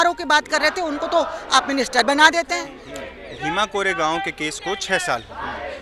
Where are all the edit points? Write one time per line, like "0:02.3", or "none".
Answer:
0:02.8